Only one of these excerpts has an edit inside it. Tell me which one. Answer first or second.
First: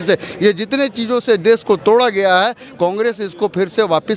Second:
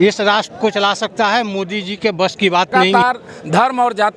second